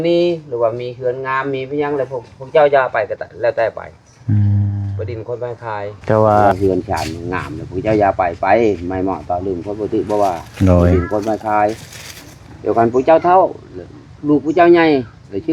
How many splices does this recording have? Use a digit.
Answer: 1